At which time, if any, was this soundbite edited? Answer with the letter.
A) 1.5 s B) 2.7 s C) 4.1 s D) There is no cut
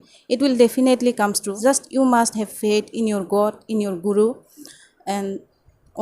A